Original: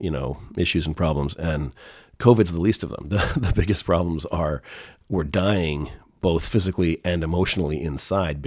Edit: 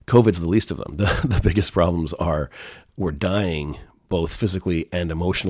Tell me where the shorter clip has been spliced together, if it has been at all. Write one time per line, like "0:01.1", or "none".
none